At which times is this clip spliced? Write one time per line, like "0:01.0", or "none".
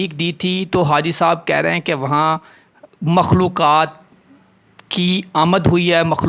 none